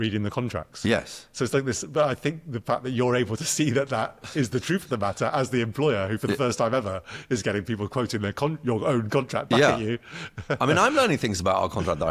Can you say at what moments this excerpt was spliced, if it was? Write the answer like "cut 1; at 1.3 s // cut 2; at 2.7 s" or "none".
none